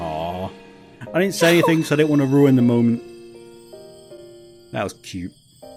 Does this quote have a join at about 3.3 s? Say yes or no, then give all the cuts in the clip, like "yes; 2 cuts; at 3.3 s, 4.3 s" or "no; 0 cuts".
no; 0 cuts